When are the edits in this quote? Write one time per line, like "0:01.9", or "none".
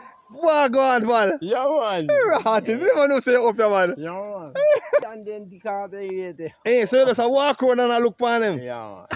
0:05.1